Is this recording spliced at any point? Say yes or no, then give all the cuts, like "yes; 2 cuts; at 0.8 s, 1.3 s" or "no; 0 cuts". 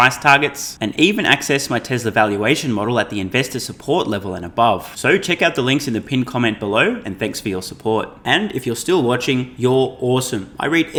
no; 0 cuts